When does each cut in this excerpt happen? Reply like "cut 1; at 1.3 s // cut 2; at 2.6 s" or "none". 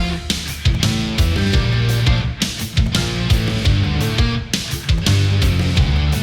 none